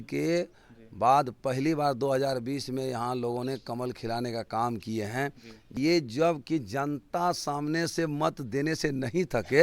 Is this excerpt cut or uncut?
cut